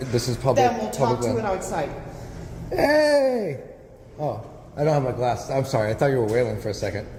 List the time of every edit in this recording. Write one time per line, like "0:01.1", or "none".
none